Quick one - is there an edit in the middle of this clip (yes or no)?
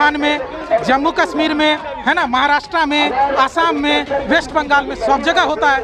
no